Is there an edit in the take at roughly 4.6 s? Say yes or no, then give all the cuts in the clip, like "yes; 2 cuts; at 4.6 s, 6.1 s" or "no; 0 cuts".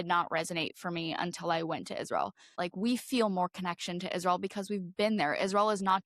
no; 1 cut; at 2.6 s